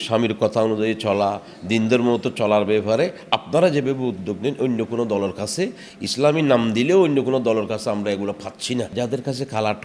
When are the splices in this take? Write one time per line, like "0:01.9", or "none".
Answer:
0:08.9